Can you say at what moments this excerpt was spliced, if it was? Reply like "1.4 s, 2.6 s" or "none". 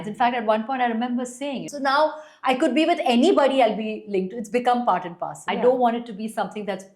1.6 s, 5.3 s